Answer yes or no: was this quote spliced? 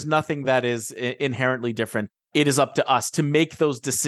no